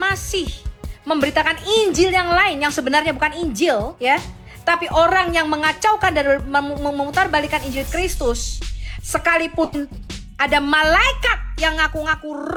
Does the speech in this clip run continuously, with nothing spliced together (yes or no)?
yes